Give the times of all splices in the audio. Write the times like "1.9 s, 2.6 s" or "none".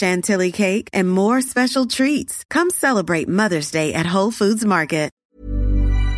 5.2 s